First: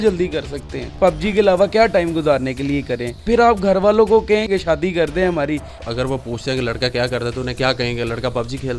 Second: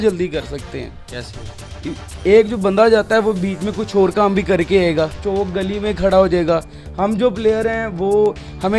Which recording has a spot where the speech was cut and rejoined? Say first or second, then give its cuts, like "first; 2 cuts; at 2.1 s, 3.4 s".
first; 4 cuts; at 0.9 s, 3.1 s, 4.5 s, 5.7 s